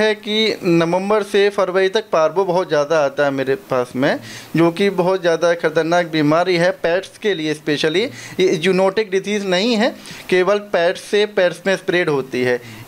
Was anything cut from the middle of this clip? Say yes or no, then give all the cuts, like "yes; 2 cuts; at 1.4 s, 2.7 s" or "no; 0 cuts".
no; 0 cuts